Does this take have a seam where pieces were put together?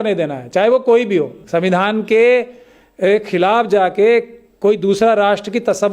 yes; 1 cut; at 1.4 s

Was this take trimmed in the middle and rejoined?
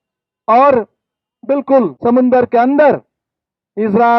yes; 1 cut; at 1.9 s

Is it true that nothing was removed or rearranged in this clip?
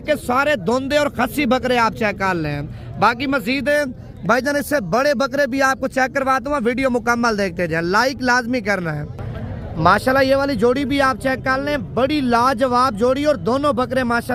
yes; 0 cuts

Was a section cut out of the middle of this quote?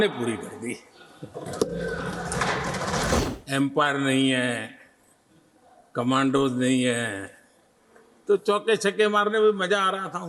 yes; 1 cut; at 3.2 s

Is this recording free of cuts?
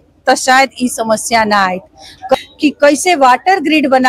no; 1 cut; at 2.3 s

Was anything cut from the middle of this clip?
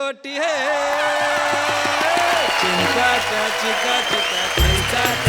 no; 0 cuts

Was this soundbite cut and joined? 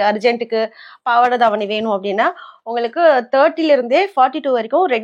no; 0 cuts

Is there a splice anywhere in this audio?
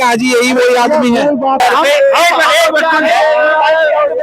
yes; 1 cut; at 1.6 s

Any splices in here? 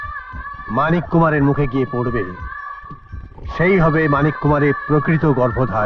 no; 0 cuts

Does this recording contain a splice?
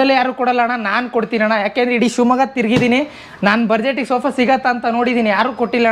no; 0 cuts

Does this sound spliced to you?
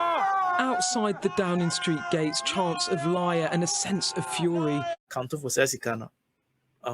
yes; 1 cut; at 5.1 s

